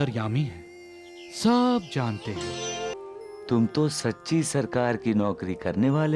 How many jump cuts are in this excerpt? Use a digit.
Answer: 1